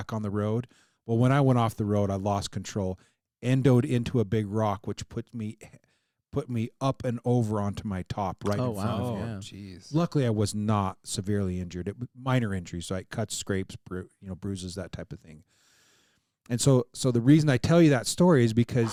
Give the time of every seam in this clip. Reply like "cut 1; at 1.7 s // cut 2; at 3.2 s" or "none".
none